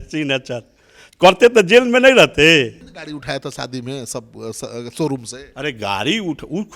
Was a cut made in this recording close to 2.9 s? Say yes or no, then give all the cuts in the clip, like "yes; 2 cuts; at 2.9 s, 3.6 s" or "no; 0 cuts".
yes; 1 cut; at 2.9 s